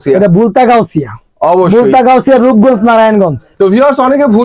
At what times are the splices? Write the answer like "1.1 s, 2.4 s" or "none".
none